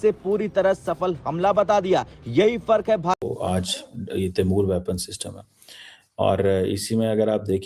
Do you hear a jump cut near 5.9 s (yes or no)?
no